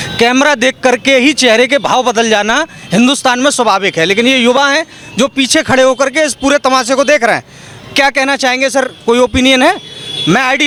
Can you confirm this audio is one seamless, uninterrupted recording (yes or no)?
yes